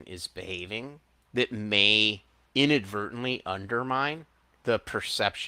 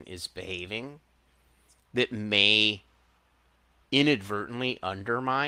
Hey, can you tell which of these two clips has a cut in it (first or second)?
first